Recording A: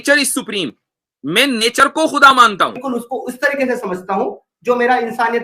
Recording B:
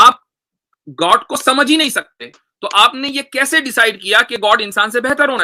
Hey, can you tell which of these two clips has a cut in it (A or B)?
A